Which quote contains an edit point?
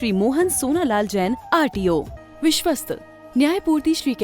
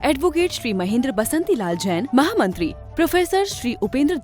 first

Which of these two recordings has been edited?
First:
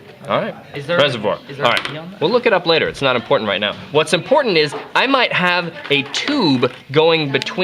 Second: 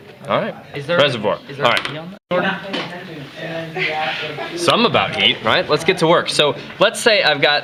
first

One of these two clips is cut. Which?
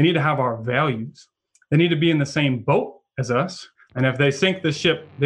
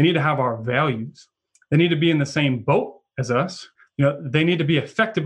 first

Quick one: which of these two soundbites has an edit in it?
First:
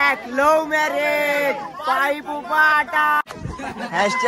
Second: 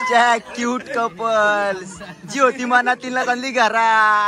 first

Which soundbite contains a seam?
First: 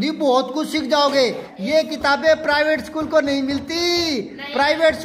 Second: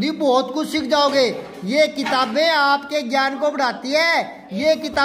first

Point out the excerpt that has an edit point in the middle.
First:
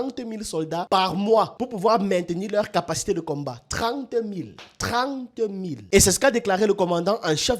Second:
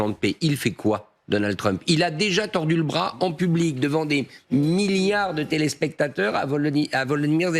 first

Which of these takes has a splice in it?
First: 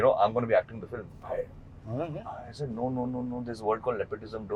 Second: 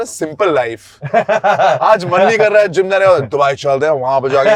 first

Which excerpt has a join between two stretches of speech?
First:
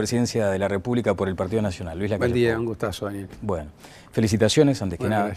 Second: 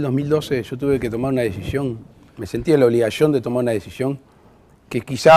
second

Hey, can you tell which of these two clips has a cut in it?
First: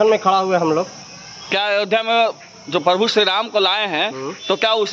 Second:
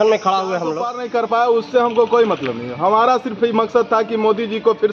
second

